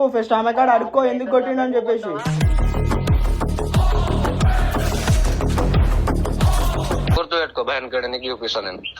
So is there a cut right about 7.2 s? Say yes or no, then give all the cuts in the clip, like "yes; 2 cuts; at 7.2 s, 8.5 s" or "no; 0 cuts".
yes; 1 cut; at 7.2 s